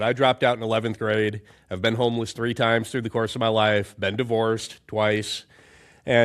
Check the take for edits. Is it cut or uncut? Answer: uncut